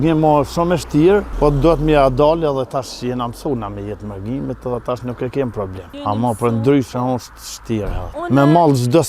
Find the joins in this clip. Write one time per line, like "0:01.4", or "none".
0:01.3
0:05.8
0:08.2